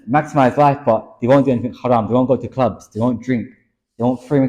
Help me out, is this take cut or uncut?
uncut